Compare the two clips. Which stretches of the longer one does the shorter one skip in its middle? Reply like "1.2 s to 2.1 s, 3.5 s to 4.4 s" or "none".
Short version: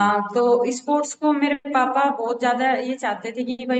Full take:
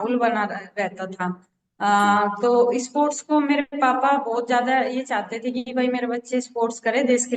none